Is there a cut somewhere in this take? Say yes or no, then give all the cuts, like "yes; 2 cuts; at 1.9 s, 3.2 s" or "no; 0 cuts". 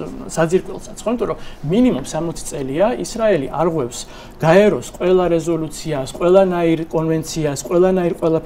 no; 0 cuts